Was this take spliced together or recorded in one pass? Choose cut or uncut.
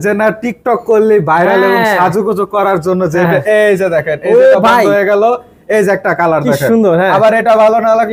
uncut